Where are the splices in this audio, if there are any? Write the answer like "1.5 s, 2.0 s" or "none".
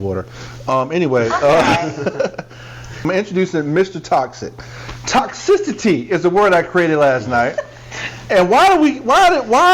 3.0 s